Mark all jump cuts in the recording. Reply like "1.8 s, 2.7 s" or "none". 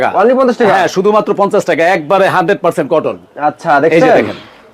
none